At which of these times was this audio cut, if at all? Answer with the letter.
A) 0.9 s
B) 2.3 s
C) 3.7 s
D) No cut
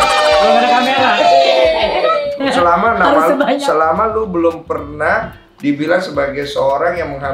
B